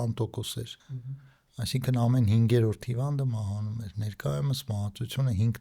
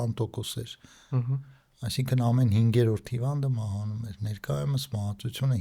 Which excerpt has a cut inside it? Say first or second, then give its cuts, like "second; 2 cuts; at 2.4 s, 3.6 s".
first; 1 cut; at 1.1 s